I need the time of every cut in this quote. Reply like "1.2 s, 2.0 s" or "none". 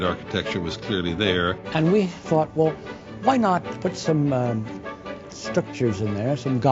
1.6 s, 3.7 s